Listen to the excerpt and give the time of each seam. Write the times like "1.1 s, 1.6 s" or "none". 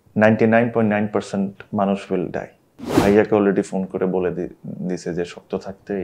3.0 s